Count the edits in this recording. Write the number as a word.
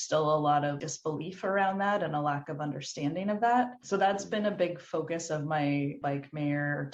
zero